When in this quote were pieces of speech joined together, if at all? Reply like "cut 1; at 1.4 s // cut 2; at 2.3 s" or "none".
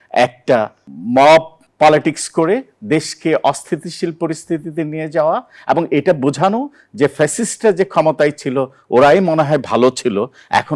none